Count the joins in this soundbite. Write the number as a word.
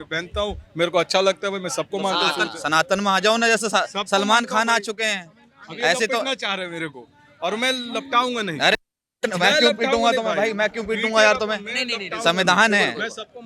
zero